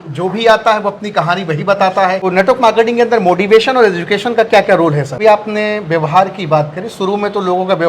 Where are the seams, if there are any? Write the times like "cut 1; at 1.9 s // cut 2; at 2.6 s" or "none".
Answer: cut 1; at 2.2 s // cut 2; at 5.1 s